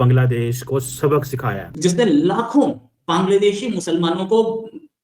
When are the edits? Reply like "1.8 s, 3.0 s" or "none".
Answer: 1.6 s